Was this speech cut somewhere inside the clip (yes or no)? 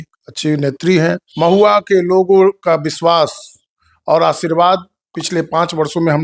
yes